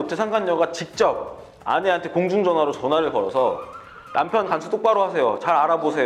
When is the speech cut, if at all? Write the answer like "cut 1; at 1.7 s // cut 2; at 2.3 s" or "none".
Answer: none